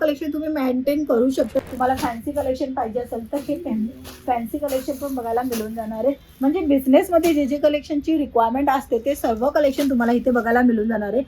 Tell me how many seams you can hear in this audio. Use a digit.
1